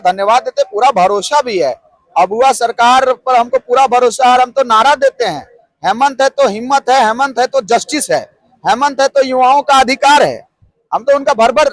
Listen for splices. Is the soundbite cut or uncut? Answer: uncut